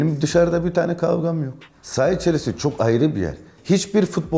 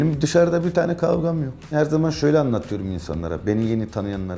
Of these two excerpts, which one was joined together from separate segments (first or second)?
first